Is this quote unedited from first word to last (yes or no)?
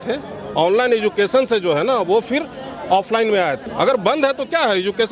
no